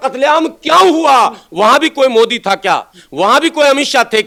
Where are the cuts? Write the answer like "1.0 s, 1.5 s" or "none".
none